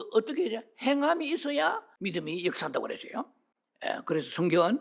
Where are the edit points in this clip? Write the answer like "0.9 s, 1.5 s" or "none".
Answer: 1.9 s